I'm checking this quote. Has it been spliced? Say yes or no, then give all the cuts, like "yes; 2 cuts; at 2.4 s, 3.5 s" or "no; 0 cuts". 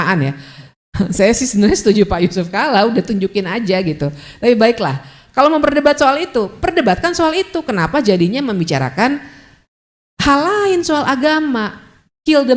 no; 0 cuts